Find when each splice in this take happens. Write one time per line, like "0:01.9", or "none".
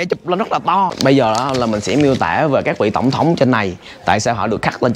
0:00.9